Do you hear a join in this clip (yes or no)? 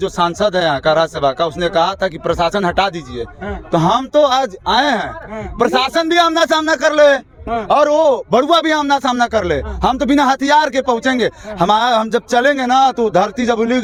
no